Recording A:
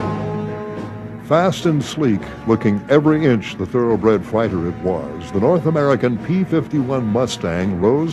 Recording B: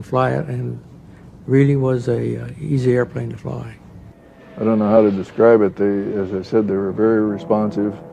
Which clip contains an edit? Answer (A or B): B